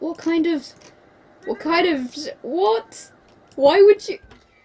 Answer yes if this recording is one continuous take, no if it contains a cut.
yes